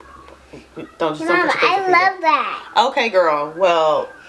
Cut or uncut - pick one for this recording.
uncut